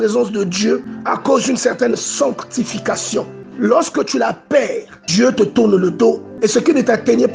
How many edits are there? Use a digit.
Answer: 4